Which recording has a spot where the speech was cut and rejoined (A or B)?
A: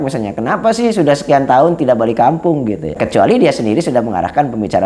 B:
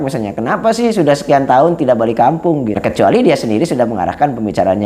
B